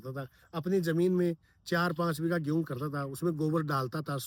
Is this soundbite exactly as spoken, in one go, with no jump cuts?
yes; 0 cuts

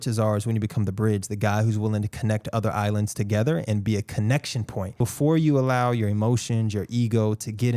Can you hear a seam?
yes; 1 cut; at 5.0 s

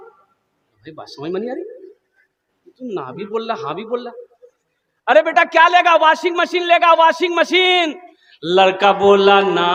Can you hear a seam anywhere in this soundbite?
no; 0 cuts

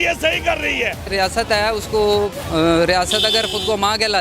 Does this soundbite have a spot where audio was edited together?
yes; 1 cut; at 1.1 s

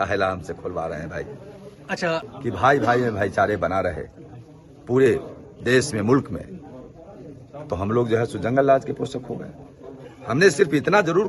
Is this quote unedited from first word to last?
no; 1 cut; at 2.3 s

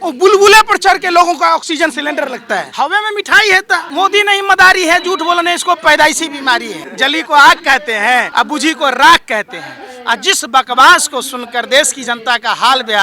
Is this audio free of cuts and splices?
no; 4 cuts; at 2.7 s, 3.9 s, 6.8 s, 8.3 s

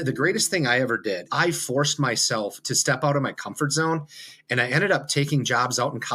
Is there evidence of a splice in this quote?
yes; 1 cut; at 1.3 s

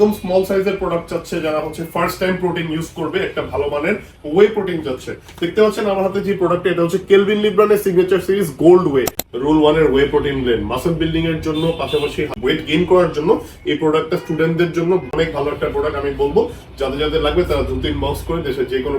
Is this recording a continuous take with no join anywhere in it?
no; 3 cuts; at 9.2 s, 12.3 s, 15.1 s

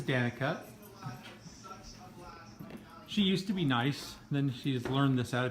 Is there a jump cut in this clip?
no; 0 cuts

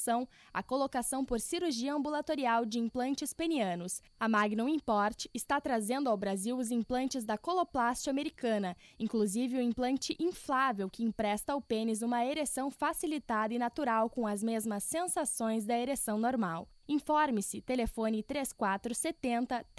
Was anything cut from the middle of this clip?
no; 0 cuts

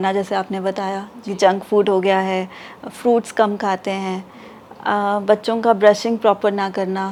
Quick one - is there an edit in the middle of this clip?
no; 0 cuts

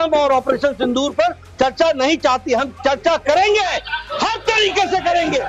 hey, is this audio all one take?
yes; 0 cuts

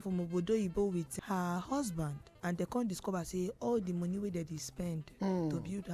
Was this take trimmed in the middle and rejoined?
yes; 2 cuts; at 1.1 s, 2.2 s

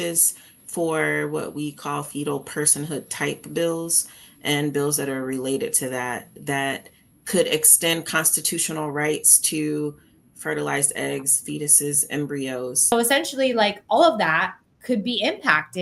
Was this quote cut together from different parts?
yes; 1 cut; at 12.9 s

